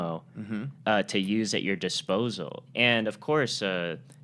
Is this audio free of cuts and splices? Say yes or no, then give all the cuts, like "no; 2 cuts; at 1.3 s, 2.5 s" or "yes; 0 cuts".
no; 1 cut; at 2.6 s